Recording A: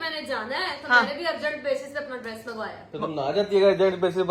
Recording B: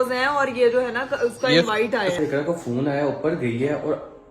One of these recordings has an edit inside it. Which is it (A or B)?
B